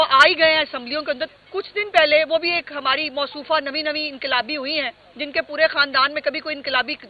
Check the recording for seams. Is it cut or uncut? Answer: cut